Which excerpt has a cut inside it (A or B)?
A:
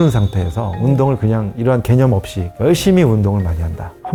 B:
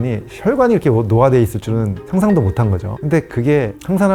B